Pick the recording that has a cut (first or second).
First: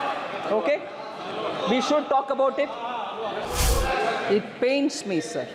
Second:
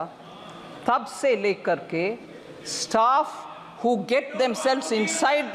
first